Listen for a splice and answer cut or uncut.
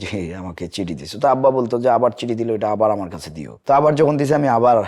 uncut